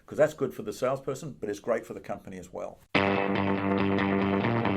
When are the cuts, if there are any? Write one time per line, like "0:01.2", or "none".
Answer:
0:02.8